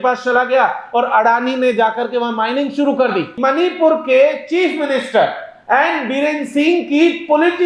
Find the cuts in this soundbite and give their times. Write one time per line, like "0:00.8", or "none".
0:03.3